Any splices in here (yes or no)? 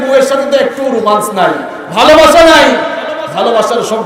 no